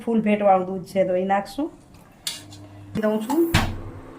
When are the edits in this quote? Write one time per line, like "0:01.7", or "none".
0:03.0